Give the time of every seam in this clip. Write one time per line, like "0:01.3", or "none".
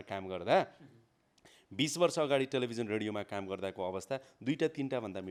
none